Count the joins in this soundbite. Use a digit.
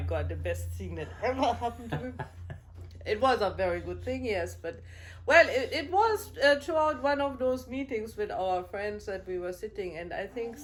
0